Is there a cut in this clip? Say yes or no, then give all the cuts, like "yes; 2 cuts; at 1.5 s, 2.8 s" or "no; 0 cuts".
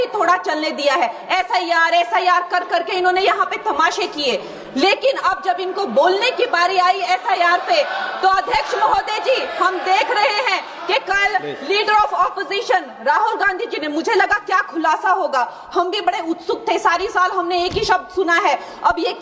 no; 0 cuts